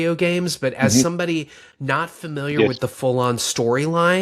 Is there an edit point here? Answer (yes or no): no